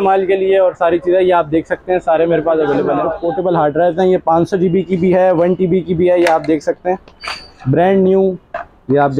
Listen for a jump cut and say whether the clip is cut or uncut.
cut